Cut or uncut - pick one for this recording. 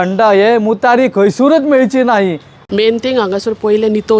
cut